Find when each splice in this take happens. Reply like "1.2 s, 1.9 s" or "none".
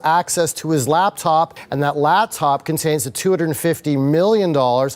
none